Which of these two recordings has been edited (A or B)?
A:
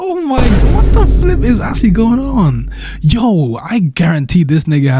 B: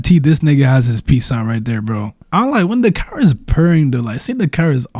B